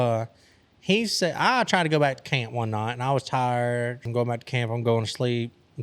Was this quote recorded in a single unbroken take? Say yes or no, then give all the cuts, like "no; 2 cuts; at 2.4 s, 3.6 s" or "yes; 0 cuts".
no; 1 cut; at 4.1 s